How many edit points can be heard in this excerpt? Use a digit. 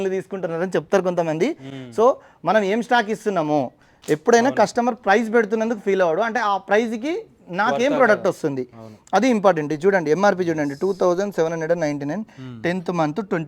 0